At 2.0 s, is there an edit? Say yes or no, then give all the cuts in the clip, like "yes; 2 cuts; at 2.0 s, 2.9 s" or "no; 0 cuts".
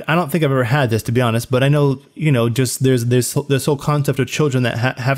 no; 0 cuts